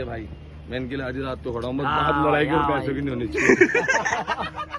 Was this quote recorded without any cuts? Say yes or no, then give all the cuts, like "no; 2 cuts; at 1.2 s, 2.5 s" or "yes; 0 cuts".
yes; 0 cuts